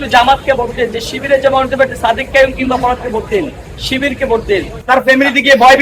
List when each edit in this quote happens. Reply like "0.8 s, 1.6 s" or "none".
4.7 s